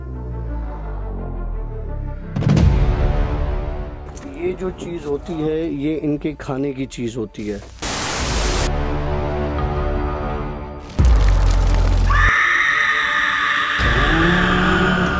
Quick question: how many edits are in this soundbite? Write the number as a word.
zero